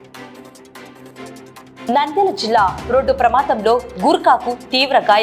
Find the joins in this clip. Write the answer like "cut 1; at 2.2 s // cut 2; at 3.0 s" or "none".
cut 1; at 1.3 s